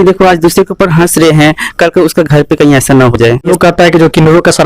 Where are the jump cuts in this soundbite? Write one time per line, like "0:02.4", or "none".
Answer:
0:03.5